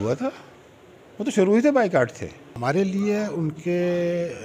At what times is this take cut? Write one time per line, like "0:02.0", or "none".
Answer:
0:02.5

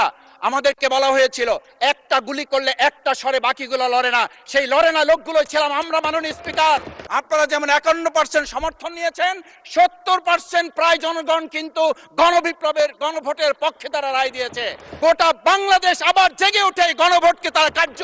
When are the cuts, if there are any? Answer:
0:07.0
0:14.9

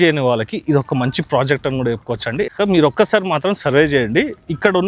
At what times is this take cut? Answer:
0:02.5

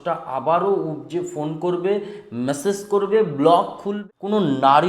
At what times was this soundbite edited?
0:03.9

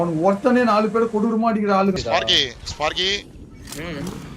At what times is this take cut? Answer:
0:02.0

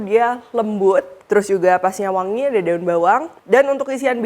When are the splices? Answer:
0:03.3

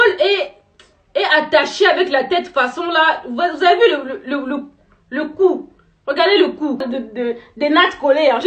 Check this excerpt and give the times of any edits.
0:06.9

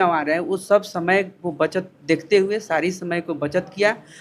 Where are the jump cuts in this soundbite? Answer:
none

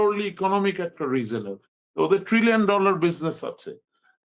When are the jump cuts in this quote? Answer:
none

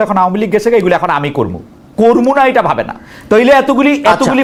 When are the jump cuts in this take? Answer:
none

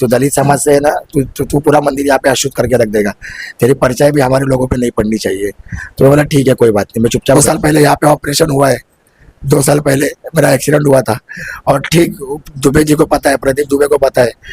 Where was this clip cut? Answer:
0:07.4

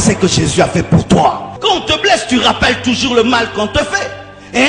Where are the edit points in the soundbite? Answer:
0:01.5

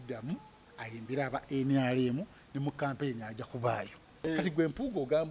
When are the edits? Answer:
0:04.1

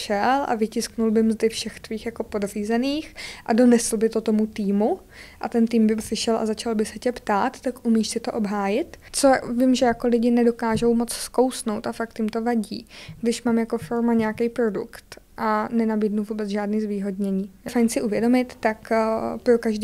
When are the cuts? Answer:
0:09.0
0:17.7

